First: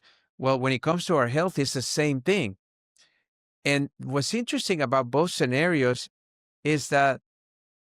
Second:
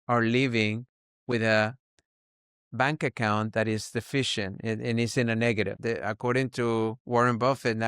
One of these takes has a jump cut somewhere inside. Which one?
second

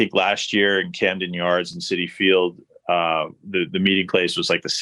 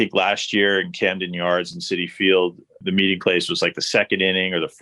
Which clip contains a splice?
second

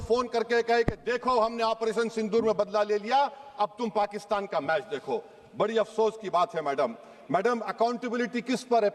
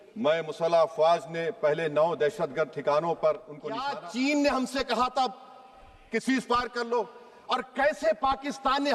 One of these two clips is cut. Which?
second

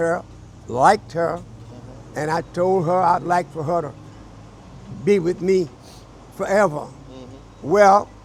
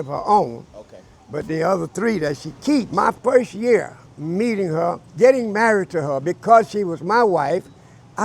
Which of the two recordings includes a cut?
second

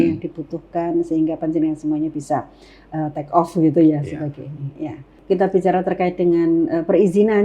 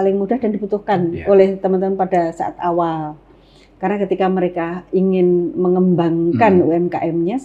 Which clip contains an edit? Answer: first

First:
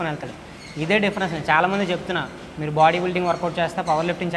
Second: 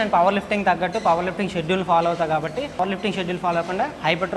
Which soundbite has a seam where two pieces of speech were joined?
second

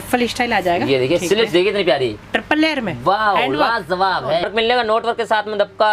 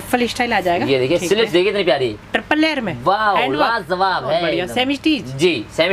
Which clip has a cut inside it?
first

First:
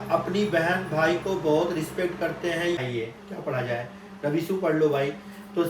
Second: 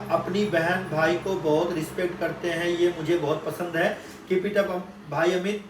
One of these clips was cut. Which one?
first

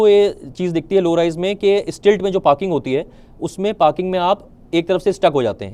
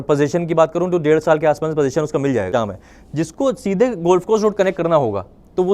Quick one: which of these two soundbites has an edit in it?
second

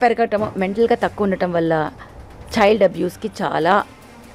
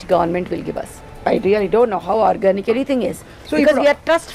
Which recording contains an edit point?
second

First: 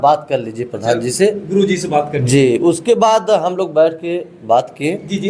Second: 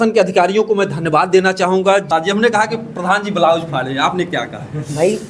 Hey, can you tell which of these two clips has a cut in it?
second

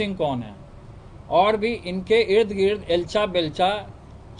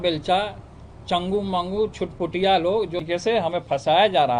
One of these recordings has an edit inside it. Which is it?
second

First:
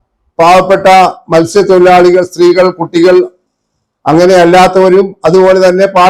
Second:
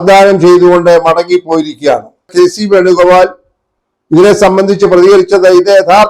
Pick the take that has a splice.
second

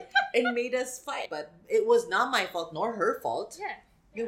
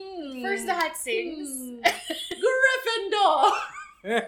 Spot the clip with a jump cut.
first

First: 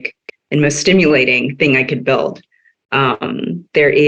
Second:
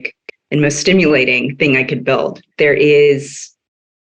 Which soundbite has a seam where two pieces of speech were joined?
second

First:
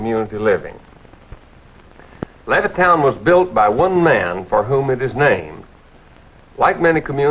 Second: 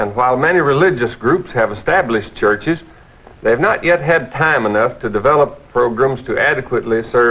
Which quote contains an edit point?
second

